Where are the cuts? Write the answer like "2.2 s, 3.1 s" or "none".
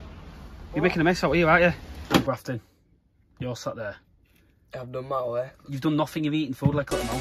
2.2 s